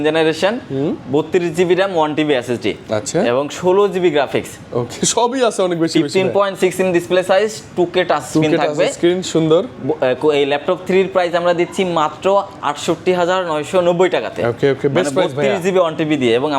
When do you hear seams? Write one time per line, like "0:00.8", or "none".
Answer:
none

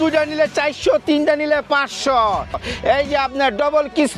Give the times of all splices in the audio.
0:02.6

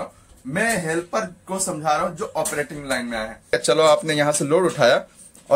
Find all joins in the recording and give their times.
0:03.6

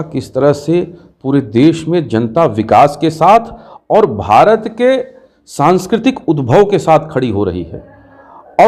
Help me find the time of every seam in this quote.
none

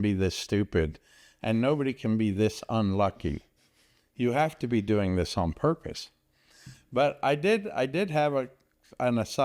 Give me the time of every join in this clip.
none

